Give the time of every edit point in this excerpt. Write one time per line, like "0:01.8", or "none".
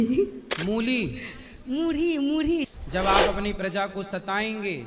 0:02.7